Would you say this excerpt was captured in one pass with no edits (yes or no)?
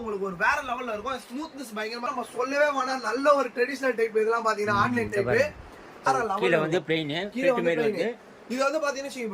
no